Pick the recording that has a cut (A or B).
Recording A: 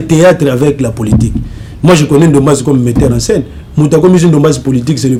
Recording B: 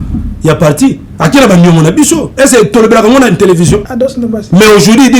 B